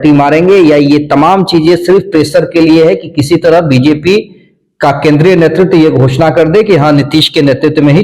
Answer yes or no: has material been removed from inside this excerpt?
no